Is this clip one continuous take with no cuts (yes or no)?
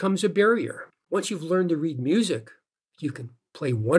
no